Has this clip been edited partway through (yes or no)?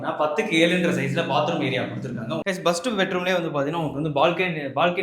yes